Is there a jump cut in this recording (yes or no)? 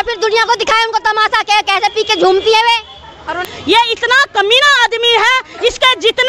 yes